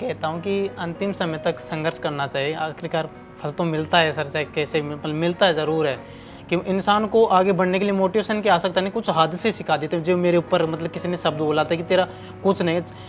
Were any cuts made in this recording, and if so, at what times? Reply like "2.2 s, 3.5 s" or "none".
none